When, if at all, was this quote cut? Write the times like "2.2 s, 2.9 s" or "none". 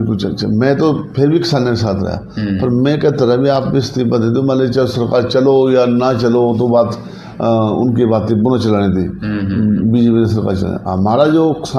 none